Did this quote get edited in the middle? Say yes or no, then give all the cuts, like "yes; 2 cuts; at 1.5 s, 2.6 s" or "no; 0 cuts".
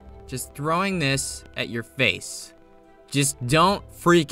no; 0 cuts